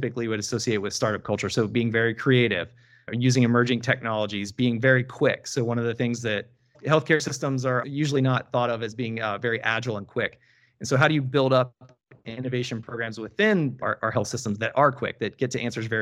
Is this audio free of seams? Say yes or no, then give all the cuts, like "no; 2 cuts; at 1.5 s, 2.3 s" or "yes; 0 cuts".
yes; 0 cuts